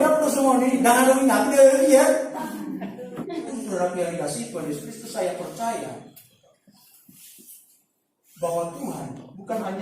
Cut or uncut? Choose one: cut